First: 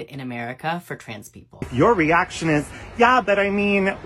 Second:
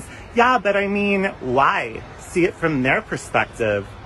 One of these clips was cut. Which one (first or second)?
first